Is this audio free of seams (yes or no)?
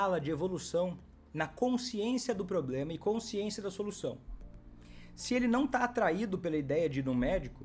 yes